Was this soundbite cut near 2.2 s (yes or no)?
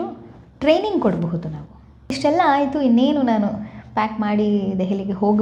yes